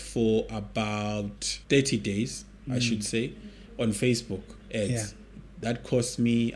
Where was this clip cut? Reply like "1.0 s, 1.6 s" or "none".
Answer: 1.5 s